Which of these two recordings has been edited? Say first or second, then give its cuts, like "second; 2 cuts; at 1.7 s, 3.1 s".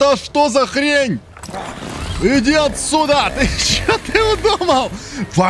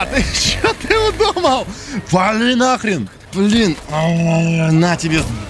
second; 1 cut; at 3.2 s